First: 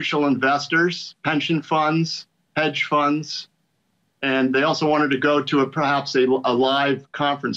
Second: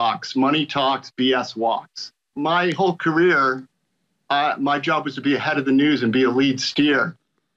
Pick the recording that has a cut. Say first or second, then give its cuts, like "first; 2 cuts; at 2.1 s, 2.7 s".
second; 1 cut; at 2.2 s